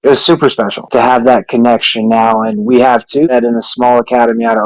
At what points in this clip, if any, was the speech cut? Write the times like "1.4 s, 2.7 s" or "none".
0.9 s, 3.3 s